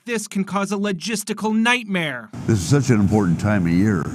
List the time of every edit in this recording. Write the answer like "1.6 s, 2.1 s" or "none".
none